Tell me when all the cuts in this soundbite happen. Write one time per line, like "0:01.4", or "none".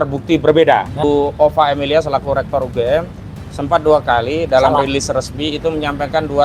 0:00.9

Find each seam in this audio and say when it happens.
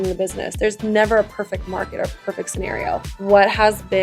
0:03.1

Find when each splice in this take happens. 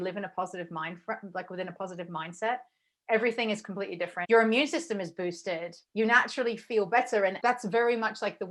0:04.2
0:05.8
0:07.4

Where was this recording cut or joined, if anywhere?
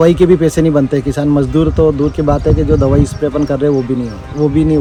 none

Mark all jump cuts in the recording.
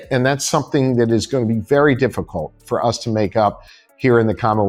none

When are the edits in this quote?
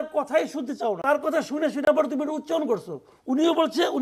0:00.9

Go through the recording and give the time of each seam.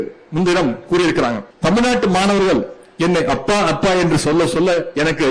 0:01.5

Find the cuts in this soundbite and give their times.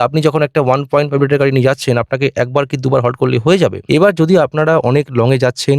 0:03.8

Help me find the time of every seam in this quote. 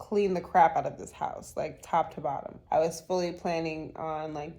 0:02.5

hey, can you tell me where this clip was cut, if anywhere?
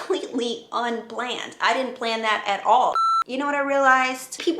0:03.0

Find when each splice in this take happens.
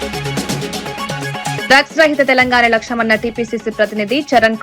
0:01.6

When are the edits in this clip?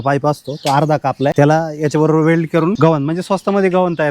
0:01.3
0:02.8

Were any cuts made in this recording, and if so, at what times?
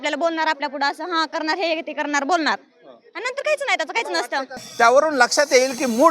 0:04.6

